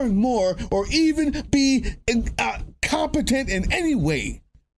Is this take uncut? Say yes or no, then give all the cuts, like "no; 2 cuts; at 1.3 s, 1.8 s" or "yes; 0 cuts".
yes; 0 cuts